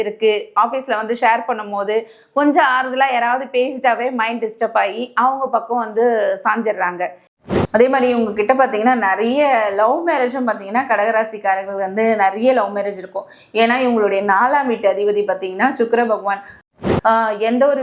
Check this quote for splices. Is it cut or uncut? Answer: cut